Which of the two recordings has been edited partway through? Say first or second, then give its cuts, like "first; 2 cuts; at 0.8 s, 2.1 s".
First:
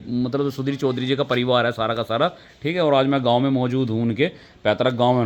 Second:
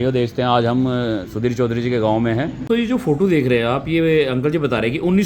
second; 1 cut; at 2.6 s